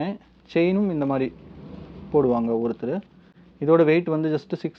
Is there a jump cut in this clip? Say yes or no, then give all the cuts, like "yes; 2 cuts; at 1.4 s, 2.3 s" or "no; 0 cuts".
no; 0 cuts